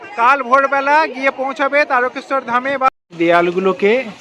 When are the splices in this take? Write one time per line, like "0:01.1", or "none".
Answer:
0:02.9